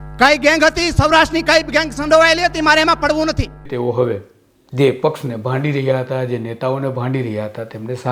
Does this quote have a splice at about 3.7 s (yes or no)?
yes